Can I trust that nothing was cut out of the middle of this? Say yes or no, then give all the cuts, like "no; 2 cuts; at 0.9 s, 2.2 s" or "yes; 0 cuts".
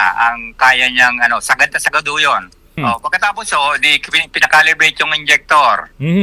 no; 1 cut; at 2.6 s